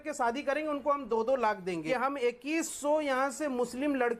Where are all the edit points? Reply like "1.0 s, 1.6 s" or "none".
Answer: 1.8 s